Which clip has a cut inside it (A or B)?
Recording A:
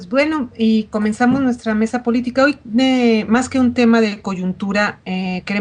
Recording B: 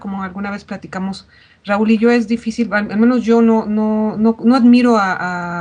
A